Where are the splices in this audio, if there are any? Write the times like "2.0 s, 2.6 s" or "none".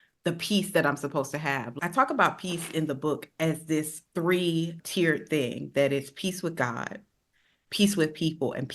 1.7 s, 4.0 s